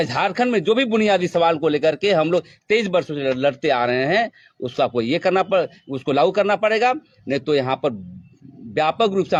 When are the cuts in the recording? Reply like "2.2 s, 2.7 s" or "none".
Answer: none